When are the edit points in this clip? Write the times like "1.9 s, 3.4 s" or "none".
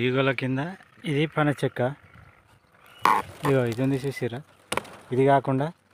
none